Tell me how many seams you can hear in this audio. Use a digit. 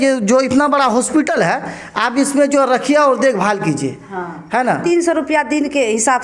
1